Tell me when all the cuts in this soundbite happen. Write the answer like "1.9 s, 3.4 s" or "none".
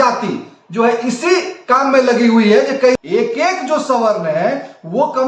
3.0 s

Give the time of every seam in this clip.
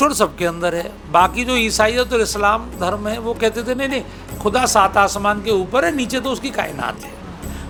none

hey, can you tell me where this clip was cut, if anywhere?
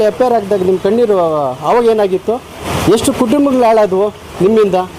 2.7 s

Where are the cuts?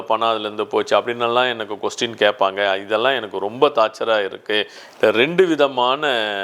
4.8 s

